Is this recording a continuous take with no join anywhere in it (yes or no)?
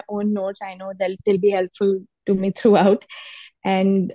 yes